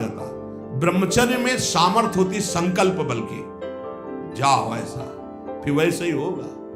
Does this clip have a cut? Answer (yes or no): no